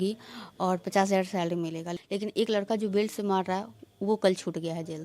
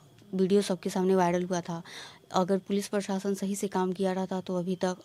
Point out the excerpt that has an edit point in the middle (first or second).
first